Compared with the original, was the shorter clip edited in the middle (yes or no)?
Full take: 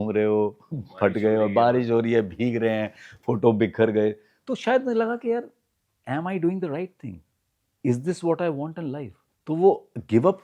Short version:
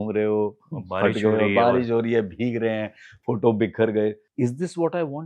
yes